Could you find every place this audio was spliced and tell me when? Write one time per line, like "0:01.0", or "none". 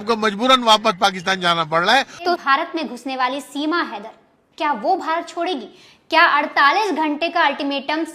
0:02.4